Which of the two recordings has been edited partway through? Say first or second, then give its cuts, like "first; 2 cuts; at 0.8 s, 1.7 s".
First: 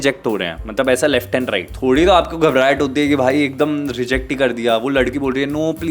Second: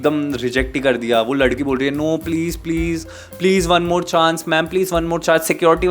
first; 1 cut; at 1.7 s